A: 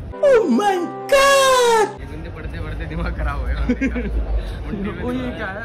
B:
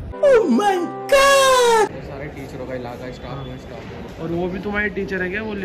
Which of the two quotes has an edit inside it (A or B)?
B